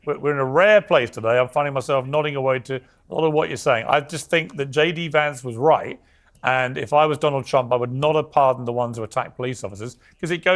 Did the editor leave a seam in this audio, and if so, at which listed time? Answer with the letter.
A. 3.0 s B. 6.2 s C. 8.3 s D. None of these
D